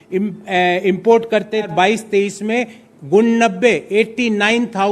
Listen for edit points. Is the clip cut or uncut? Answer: cut